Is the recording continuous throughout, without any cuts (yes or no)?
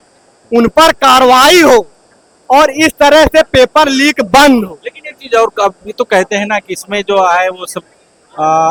yes